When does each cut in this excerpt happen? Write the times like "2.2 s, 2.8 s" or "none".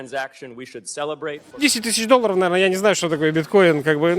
1.4 s